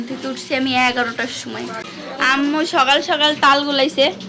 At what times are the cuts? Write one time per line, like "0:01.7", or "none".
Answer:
0:01.8